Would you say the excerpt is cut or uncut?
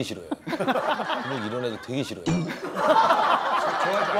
cut